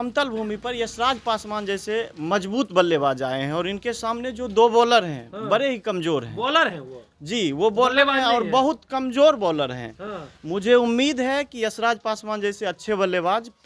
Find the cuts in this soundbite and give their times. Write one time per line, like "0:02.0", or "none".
none